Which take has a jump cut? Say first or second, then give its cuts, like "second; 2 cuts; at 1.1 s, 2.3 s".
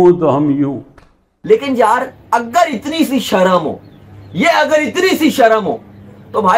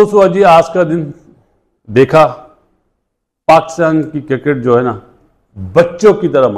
first; 1 cut; at 1.4 s